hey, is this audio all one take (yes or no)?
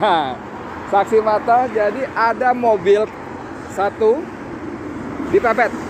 yes